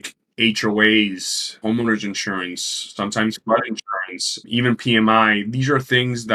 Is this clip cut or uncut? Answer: uncut